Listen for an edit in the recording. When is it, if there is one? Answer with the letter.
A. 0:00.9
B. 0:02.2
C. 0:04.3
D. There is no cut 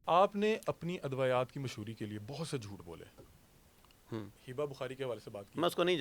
C